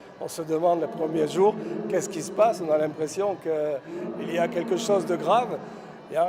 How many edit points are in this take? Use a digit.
0